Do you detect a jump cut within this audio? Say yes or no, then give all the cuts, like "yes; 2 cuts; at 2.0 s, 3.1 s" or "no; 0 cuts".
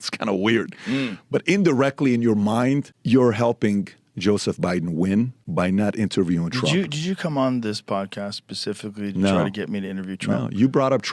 yes; 3 cuts; at 1.1 s, 2.9 s, 5.4 s